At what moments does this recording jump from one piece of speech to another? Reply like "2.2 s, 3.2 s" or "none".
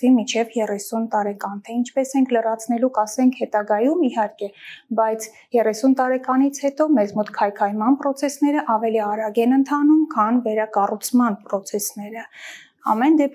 none